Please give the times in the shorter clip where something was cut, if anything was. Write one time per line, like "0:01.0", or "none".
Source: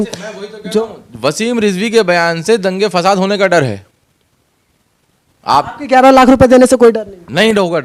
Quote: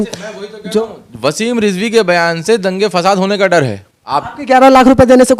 0:04.0

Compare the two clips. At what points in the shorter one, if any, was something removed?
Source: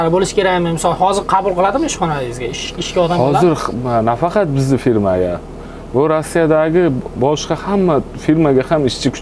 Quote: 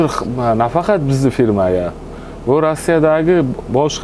none

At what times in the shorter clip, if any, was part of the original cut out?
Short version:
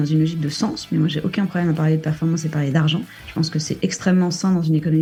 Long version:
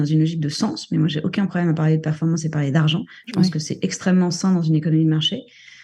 none

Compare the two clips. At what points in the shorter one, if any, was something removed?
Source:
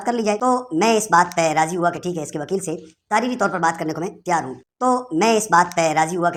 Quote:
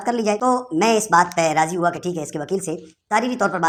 none

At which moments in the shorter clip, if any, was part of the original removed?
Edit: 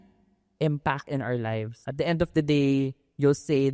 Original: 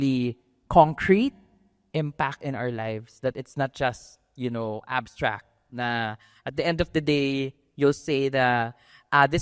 0:01.7

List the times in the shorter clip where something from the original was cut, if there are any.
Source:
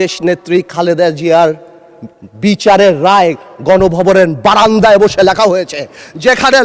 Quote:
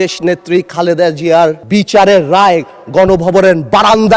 0:01.6

